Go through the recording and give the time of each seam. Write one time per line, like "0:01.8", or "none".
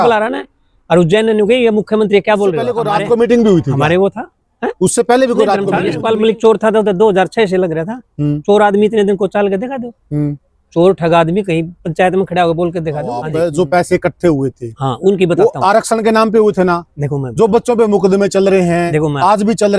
0:02.7
0:05.9
0:13.2